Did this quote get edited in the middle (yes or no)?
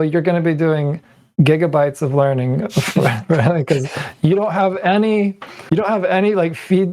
no